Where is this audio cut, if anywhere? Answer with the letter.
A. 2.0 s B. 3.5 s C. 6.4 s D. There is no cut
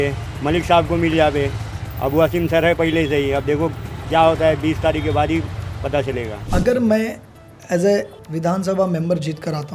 C